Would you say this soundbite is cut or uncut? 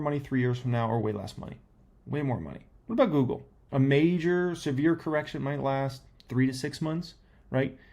cut